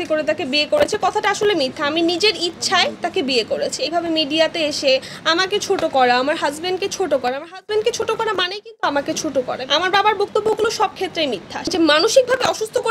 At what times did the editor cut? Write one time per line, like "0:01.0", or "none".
0:03.8
0:09.6
0:11.6